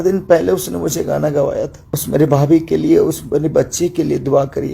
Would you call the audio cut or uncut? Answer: cut